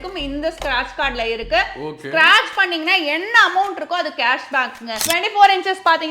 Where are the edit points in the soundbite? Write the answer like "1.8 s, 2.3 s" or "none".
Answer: 5.0 s